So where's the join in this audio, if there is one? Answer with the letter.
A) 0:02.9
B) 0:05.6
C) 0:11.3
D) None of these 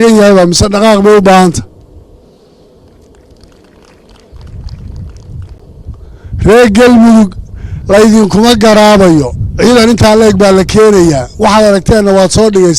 B